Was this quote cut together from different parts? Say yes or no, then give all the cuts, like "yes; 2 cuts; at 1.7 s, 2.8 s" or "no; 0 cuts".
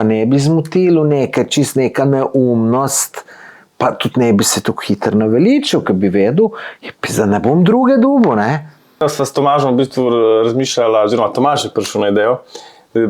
yes; 1 cut; at 9.0 s